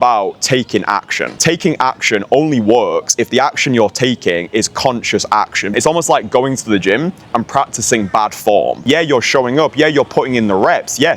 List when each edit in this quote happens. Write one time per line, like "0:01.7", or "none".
0:01.3
0:05.7
0:08.8